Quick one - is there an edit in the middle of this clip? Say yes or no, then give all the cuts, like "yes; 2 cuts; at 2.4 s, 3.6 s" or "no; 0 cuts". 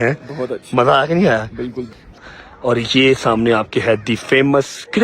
yes; 1 cut; at 1.9 s